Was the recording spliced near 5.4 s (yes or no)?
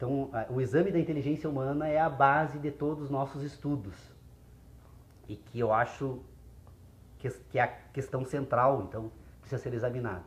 no